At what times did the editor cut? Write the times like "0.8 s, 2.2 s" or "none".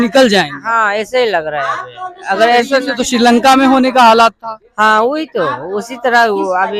none